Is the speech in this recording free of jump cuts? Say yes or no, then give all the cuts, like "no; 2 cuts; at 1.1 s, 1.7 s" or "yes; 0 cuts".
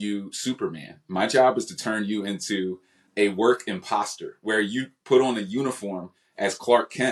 yes; 0 cuts